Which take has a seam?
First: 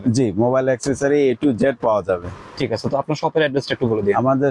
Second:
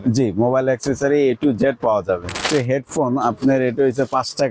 second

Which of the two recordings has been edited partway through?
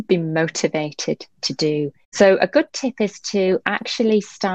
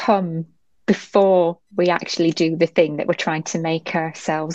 first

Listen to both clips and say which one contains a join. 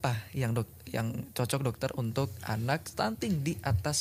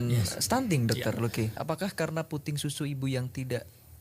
second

